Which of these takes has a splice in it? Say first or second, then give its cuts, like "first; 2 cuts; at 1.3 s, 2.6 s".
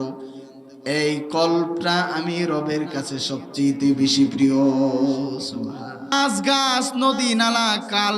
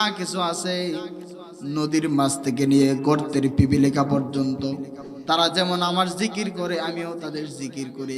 first; 1 cut; at 6.1 s